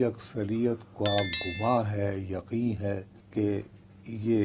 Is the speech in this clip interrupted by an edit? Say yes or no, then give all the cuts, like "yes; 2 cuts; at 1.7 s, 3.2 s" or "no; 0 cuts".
no; 0 cuts